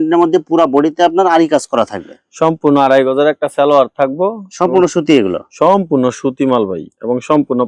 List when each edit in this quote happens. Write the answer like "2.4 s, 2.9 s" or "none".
none